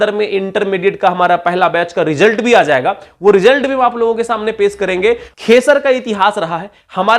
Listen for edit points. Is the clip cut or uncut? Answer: cut